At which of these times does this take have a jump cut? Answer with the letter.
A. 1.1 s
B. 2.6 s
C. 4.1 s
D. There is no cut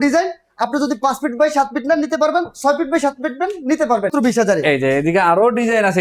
C